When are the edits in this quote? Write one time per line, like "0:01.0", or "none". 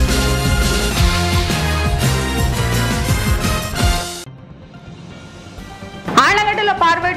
0:05.6